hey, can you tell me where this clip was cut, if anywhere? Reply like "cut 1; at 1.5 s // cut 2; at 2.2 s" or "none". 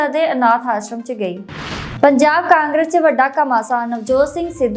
cut 1; at 1.8 s